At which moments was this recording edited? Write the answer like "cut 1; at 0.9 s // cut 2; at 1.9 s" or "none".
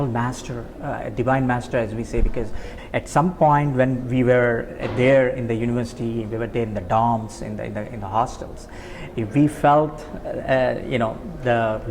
cut 1; at 2.7 s